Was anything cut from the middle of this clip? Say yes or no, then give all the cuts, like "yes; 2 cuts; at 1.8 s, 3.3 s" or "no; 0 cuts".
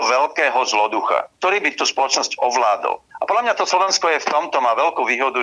no; 0 cuts